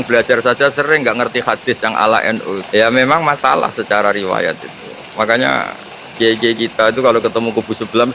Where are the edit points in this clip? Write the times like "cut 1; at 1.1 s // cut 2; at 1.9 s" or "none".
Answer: cut 1; at 2.6 s

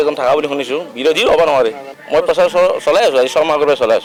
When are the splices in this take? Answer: none

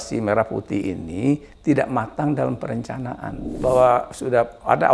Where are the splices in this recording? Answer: cut 1; at 3.5 s

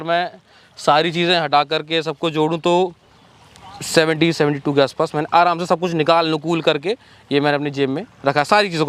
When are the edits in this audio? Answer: none

